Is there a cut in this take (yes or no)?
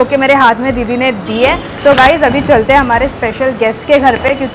yes